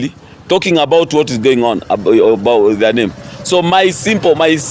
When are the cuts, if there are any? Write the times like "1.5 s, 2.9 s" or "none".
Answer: none